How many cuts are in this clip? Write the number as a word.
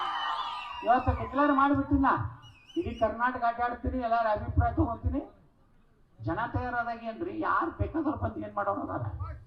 one